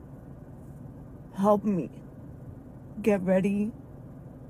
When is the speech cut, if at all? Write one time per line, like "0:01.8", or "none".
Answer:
none

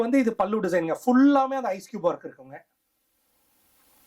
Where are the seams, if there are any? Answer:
none

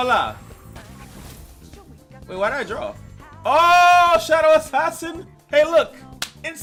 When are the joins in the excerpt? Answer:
none

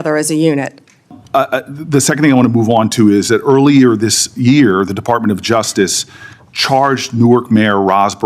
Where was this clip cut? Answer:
0:01.2

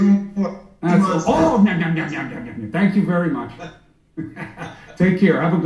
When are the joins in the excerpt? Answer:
none

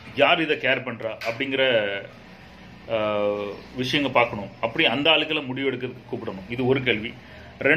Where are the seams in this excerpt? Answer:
none

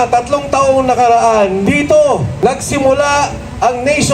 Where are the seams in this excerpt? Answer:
0:01.6
0:02.3

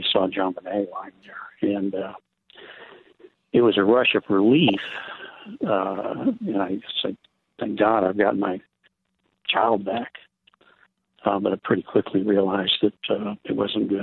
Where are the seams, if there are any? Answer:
none

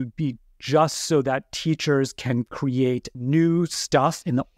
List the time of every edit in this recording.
0:03.1

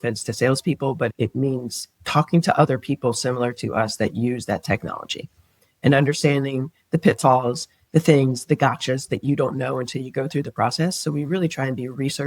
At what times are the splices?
0:01.1

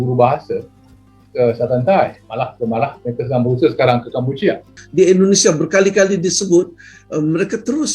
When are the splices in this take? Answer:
0:04.7

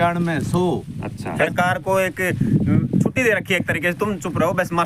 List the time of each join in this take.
0:01.5

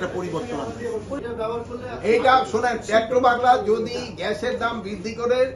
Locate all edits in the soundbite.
0:01.2

